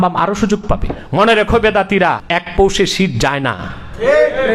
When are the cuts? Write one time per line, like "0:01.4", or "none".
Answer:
0:01.0
0:02.2